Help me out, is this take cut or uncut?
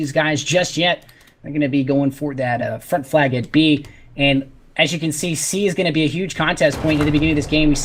uncut